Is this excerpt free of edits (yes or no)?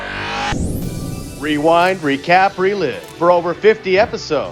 yes